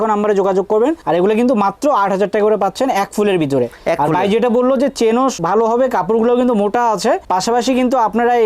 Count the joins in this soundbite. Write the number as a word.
zero